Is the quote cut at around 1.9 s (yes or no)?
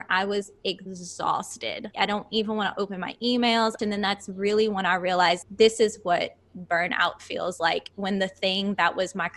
yes